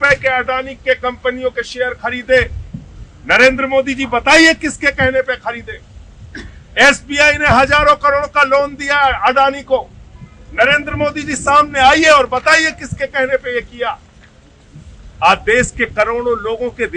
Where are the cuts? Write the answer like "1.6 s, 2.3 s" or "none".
none